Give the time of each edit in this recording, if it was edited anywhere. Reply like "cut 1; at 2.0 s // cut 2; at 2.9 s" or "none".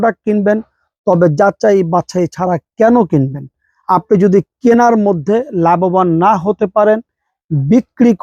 none